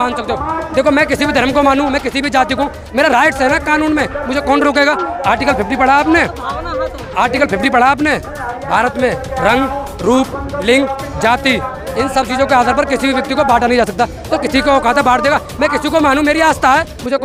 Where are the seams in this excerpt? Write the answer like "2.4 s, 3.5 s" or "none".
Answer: none